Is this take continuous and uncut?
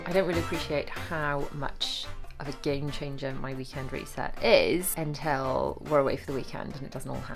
no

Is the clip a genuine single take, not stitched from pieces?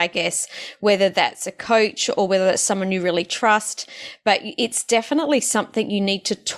yes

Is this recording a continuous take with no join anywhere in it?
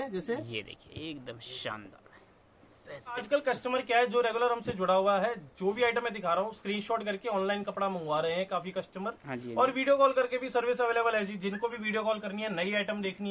no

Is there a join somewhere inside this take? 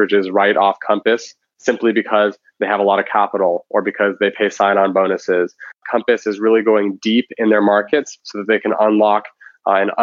yes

